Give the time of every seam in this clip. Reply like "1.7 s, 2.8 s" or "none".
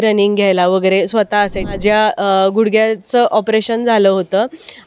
1.8 s